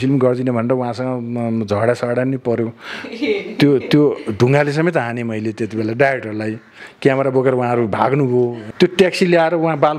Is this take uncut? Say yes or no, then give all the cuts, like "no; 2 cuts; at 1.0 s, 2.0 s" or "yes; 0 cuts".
no; 1 cut; at 8.6 s